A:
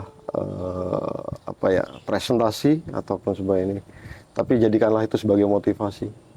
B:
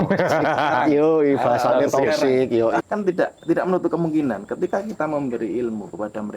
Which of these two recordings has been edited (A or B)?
B